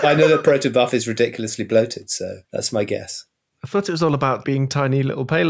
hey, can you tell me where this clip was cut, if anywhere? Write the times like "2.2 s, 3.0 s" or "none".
2.4 s, 4.4 s